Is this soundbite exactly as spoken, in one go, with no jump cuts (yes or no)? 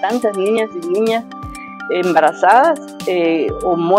yes